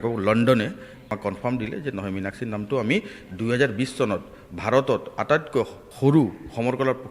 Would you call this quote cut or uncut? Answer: cut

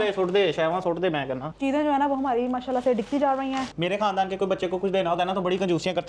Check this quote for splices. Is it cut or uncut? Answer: uncut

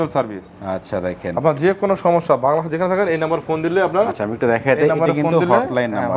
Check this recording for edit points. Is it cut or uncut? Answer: uncut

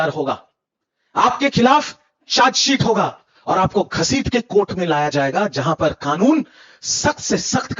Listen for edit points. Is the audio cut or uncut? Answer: uncut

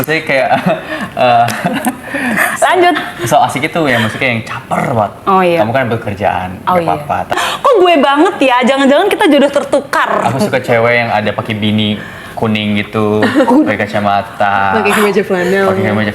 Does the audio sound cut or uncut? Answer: cut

